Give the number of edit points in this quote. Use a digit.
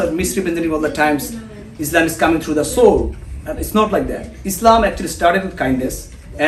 0